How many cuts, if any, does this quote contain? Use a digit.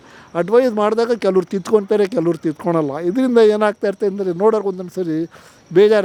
0